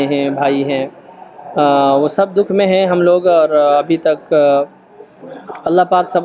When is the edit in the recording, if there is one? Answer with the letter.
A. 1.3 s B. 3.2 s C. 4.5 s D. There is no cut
D